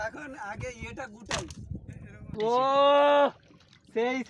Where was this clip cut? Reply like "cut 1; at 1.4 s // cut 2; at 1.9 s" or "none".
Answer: cut 1; at 2.4 s